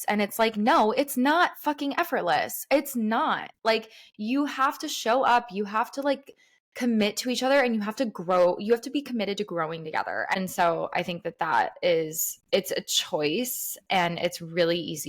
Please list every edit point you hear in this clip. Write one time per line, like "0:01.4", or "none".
0:10.4

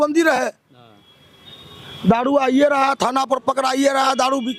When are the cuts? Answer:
none

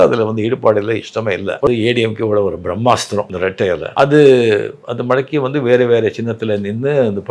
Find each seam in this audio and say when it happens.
0:01.7
0:03.3

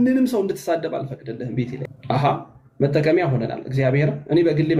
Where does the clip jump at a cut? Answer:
0:01.9

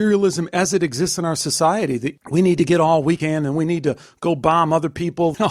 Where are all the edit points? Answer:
0:02.2

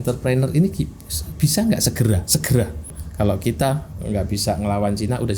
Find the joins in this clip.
0:03.0

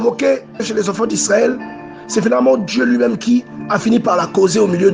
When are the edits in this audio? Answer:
none

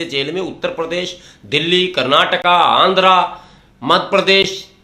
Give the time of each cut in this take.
none

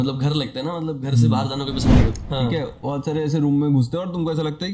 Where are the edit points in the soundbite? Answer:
0:02.2

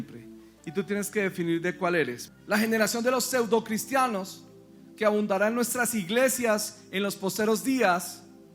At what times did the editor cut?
0:02.2

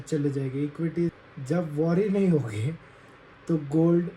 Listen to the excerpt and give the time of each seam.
0:01.1

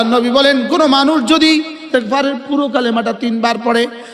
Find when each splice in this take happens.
0:01.9

